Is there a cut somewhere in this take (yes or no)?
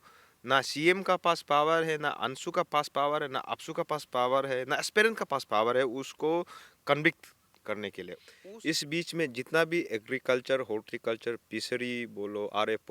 yes